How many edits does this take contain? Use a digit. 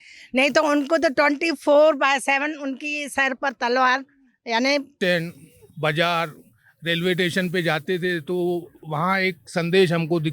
1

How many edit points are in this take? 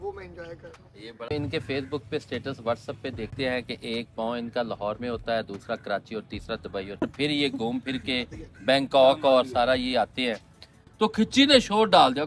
4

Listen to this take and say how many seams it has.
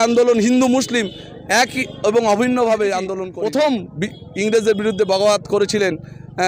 1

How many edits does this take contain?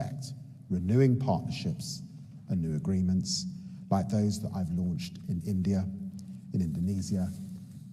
0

